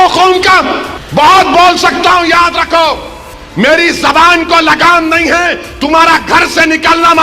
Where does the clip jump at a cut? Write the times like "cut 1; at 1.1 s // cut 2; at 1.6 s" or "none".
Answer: cut 1; at 0.9 s